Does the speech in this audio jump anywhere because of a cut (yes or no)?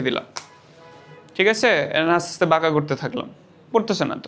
no